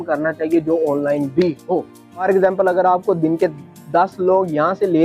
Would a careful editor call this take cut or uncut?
cut